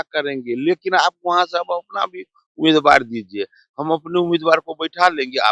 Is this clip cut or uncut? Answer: uncut